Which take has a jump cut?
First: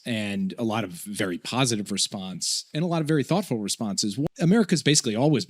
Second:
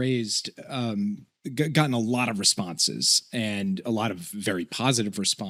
first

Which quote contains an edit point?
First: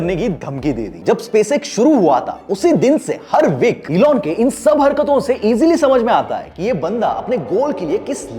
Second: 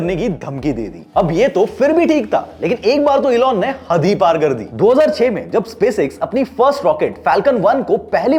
first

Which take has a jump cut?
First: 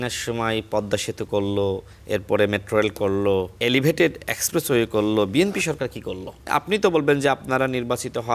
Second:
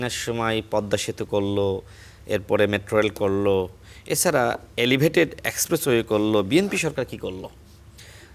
first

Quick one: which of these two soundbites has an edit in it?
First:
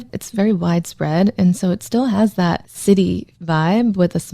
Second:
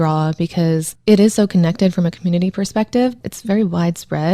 first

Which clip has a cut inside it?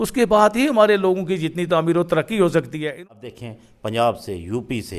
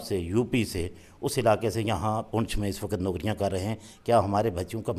first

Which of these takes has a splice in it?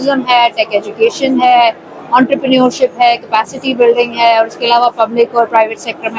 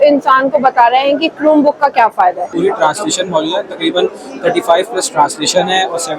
second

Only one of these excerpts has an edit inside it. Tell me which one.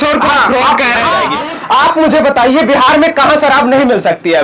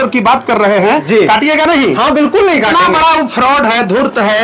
first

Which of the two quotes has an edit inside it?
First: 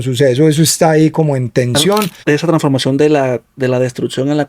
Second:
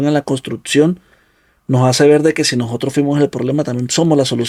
first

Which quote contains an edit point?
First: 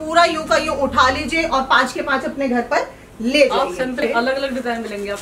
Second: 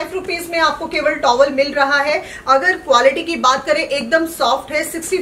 first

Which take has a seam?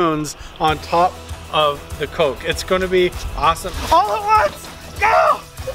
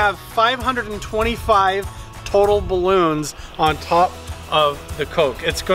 first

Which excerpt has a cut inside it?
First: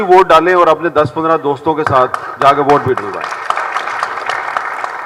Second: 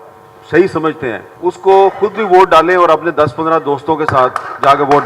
second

